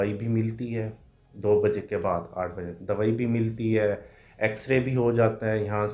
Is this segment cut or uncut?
uncut